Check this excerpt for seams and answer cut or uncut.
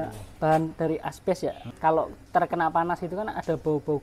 cut